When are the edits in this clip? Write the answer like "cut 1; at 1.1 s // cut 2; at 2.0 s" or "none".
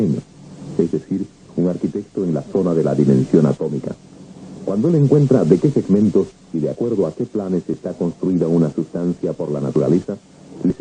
none